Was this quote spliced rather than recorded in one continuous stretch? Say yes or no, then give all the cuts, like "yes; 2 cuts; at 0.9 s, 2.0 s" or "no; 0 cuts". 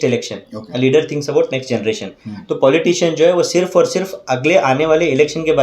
no; 0 cuts